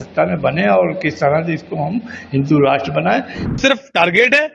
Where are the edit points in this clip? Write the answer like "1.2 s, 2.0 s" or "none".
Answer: 3.6 s